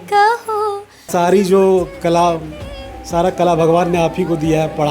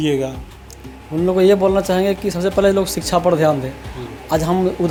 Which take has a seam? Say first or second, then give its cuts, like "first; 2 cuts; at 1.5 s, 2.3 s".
first; 1 cut; at 1.1 s